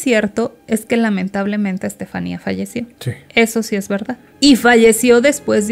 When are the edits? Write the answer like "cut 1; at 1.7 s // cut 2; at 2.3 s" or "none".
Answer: cut 1; at 4.2 s